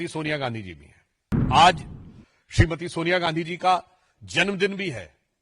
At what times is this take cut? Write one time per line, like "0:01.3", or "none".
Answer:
0:01.4